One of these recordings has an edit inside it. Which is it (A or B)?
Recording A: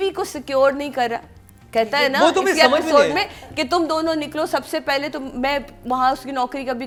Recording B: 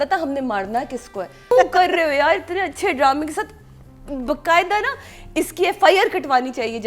B